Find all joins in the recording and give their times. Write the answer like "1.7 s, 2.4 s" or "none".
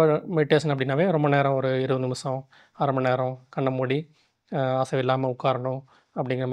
none